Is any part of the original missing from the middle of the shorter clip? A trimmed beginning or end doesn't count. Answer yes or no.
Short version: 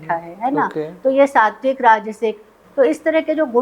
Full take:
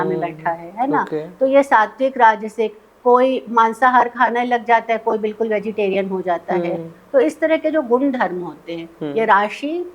yes